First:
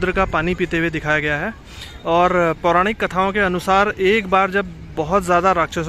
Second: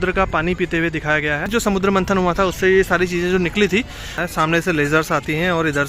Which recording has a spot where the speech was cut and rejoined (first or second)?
second